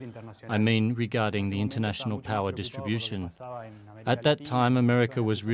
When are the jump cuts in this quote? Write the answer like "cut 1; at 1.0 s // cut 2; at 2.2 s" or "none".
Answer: cut 1; at 1.0 s